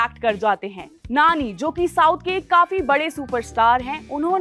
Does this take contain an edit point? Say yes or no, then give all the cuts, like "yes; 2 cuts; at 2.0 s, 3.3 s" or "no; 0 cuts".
no; 0 cuts